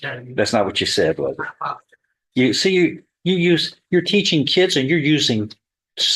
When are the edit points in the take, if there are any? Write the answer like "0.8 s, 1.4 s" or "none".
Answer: none